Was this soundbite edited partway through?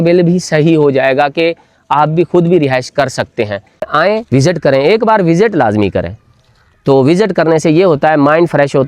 yes; 1 cut; at 3.9 s

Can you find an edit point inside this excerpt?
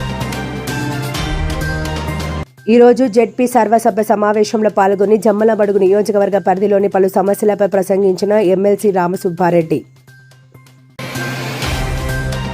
yes; 1 cut; at 2.5 s

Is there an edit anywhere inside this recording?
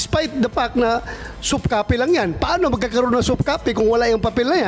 no; 0 cuts

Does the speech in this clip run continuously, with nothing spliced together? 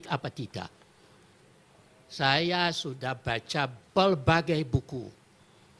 no; 1 cut; at 2.5 s

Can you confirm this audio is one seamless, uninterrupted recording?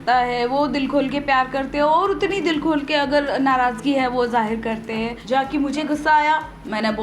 no; 1 cut; at 5.2 s

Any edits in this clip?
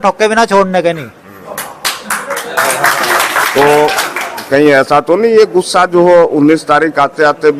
no; 0 cuts

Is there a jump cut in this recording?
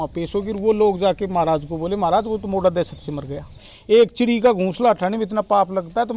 yes; 1 cut; at 3.7 s

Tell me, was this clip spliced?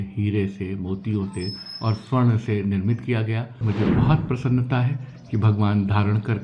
yes; 1 cut; at 3.7 s

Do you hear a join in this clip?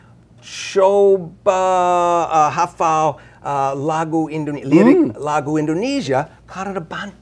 no; 0 cuts

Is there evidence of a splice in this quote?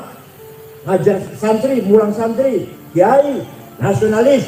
no; 0 cuts

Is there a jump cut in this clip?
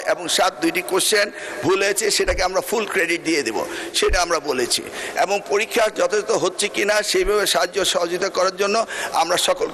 no; 0 cuts

